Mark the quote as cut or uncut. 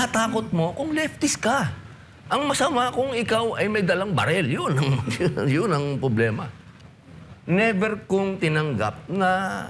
cut